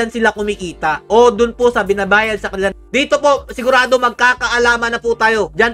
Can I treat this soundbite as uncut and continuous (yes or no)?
yes